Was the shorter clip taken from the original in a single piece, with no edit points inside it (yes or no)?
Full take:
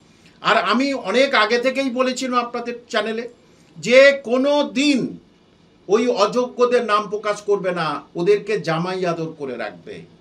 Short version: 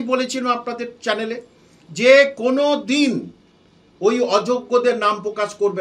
yes